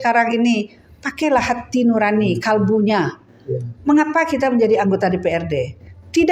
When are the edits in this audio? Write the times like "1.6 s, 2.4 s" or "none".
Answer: none